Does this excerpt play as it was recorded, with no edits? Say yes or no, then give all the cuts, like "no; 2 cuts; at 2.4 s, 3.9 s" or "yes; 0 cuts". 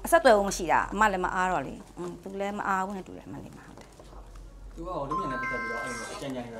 yes; 0 cuts